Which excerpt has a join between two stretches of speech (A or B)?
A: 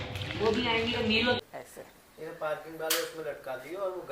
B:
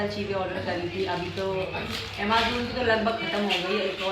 A